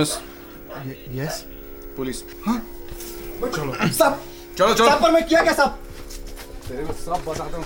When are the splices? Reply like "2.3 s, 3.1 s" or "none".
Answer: none